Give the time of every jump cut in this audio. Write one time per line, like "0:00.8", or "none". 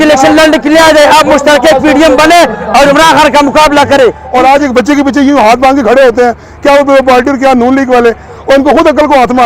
0:04.2